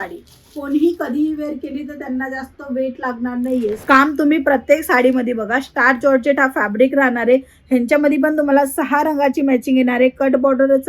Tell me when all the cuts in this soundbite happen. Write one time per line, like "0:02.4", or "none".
0:03.8